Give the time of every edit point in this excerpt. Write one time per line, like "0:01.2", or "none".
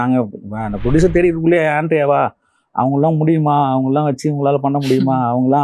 none

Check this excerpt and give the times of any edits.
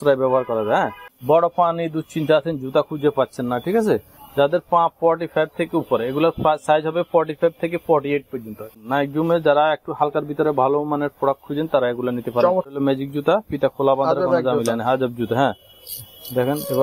0:01.0
0:08.8
0:12.7

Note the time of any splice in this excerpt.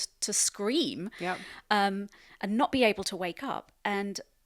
none

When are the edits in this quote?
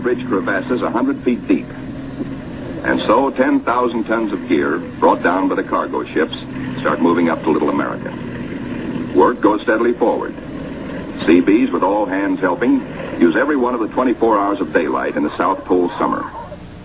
0:03.3

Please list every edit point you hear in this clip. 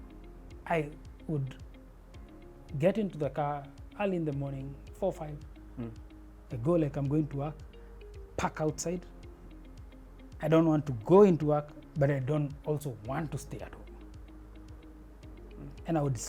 none

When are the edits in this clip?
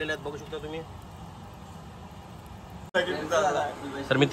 0:02.9

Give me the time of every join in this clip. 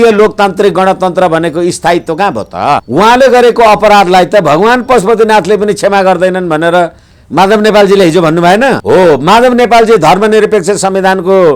0:02.9
0:08.8

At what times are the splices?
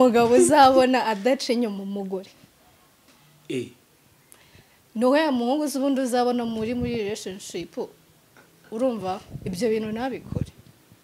none

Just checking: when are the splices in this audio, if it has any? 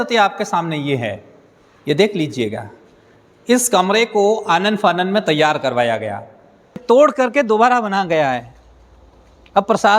0:06.8

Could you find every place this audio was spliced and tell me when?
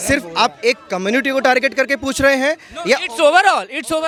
none

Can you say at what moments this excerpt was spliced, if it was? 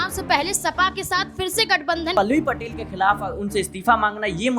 0:02.1

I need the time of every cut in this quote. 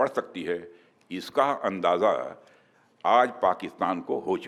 none

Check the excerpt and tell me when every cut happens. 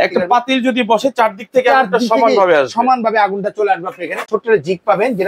0:04.3

